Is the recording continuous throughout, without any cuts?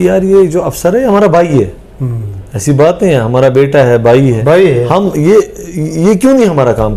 yes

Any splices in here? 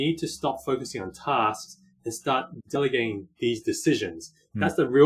no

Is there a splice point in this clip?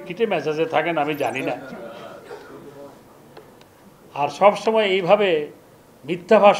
no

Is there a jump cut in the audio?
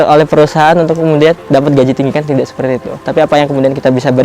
yes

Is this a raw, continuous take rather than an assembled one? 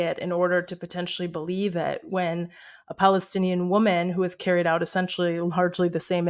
yes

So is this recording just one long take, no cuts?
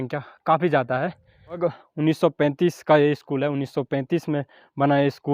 no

